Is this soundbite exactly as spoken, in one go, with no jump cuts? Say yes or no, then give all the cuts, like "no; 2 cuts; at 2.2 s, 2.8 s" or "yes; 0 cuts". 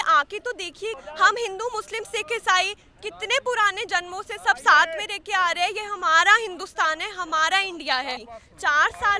no; 2 cuts; at 1.0 s, 8.2 s